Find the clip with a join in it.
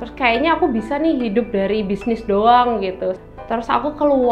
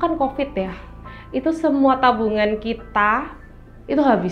first; 1 cut; at 3.2 s

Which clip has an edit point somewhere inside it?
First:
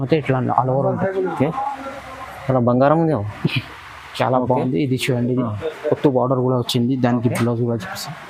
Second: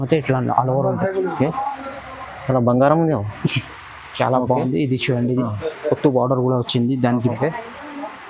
second; 1 cut; at 7.3 s

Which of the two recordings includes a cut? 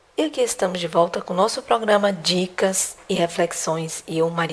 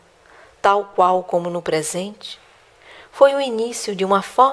second; 1 cut; at 1.3 s

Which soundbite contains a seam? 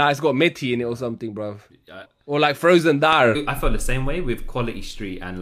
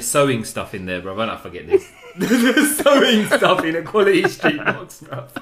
first; 2 cuts; at 2.1 s, 3.4 s

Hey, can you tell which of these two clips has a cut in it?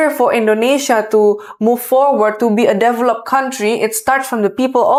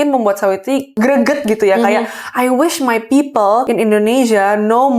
second; 2 cuts; at 0.9 s, 3.7 s

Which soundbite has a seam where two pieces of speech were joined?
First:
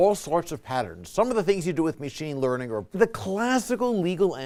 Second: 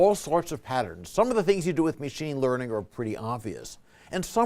second; 1 cut; at 2.9 s

